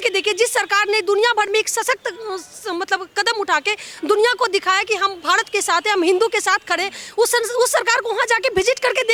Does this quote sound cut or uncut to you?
uncut